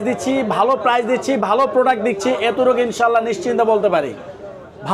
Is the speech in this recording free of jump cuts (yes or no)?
yes